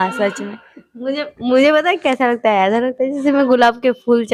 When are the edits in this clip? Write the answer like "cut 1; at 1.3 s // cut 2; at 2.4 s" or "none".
none